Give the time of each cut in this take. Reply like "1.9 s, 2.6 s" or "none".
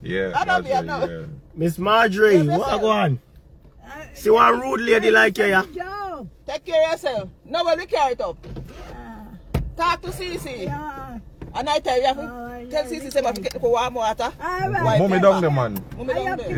none